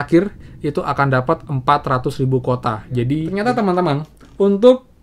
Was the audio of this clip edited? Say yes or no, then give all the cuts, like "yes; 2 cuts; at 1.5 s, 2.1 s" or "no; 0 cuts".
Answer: yes; 1 cut; at 3.3 s